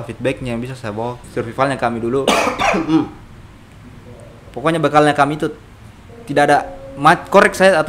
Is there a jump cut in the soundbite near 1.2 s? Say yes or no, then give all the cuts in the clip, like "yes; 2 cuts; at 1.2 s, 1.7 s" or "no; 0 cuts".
yes; 1 cut; at 1.2 s